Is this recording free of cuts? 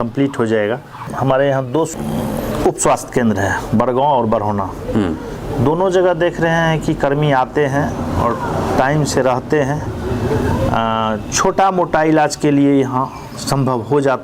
no; 1 cut; at 1.1 s

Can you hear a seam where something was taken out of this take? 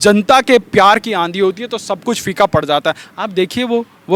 no; 0 cuts

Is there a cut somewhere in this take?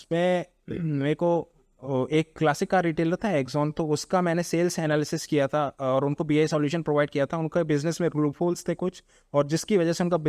no; 0 cuts

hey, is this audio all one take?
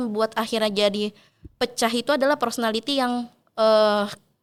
yes; 0 cuts

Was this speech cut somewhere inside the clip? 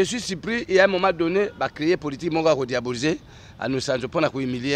no; 0 cuts

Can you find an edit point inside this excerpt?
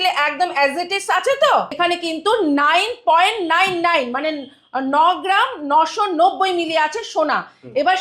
yes; 1 cut; at 1.8 s

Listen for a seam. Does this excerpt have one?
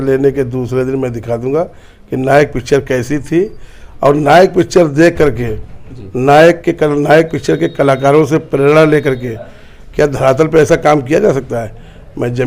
no; 0 cuts

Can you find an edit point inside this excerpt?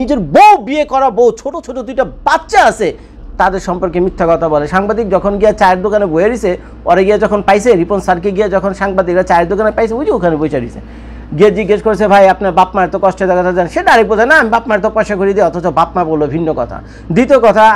no; 0 cuts

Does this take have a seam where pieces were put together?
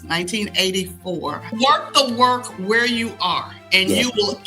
yes; 1 cut; at 1.5 s

